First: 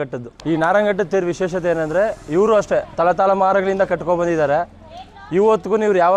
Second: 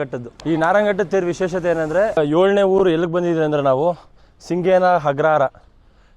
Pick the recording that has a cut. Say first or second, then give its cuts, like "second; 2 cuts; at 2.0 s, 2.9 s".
second; 1 cut; at 2.2 s